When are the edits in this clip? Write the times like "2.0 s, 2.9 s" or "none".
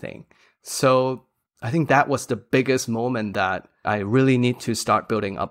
3.9 s